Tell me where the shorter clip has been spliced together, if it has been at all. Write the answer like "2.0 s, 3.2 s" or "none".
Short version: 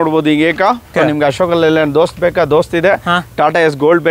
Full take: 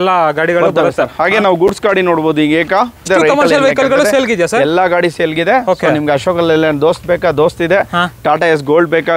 0.9 s